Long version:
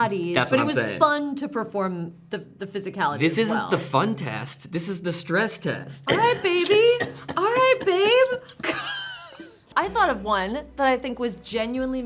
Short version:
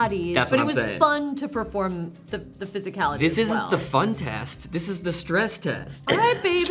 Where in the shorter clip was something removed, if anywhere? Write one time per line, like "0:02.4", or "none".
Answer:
none